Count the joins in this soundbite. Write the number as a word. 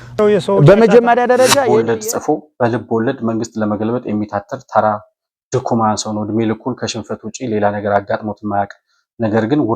one